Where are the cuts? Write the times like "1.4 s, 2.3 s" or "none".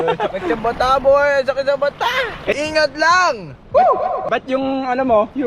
2.5 s